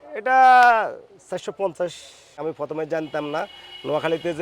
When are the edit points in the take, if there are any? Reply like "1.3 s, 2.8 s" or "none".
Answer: 2.4 s